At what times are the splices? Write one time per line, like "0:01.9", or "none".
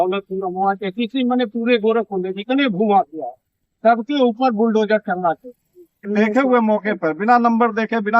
0:06.1